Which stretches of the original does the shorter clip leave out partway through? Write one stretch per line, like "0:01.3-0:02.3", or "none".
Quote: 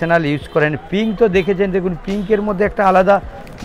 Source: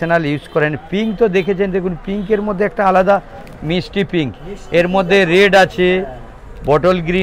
none

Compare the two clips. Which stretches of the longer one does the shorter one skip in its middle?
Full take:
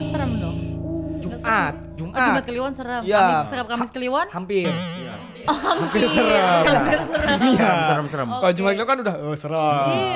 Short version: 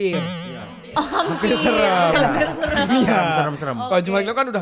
none

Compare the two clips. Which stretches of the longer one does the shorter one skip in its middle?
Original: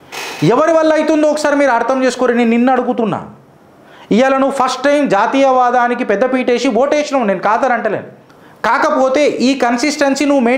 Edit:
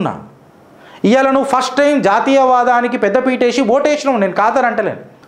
none

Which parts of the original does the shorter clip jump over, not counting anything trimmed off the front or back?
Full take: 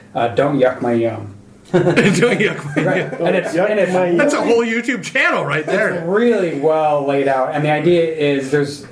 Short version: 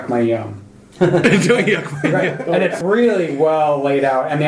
0:03.5-0:06.0

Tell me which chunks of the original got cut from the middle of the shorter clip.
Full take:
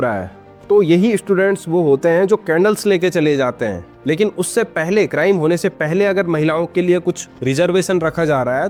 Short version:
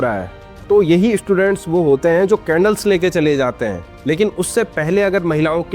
0:04.7-0:05.8

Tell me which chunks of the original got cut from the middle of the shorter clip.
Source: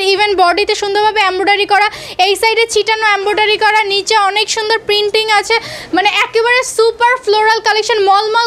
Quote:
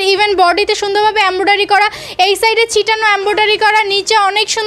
none

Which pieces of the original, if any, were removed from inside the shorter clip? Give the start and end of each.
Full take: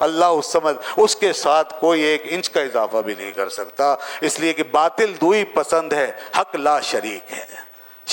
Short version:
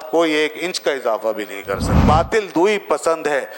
0:03.7-0:04.7

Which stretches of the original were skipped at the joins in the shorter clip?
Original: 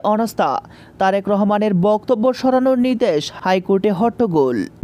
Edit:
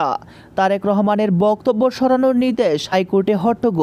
0:03.3-0:03.4

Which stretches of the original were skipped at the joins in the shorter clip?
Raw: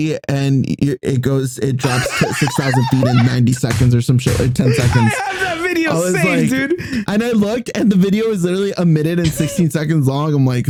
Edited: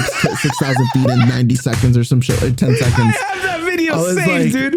none

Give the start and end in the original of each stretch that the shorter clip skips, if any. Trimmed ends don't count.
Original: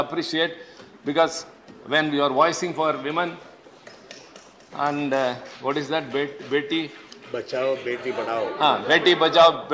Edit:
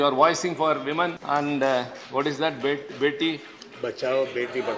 0:03.4-0:04.7

